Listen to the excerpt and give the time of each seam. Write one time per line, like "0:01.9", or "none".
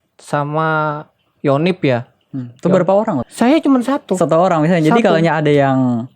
0:03.3